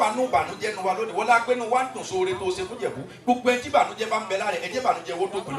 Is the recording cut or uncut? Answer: uncut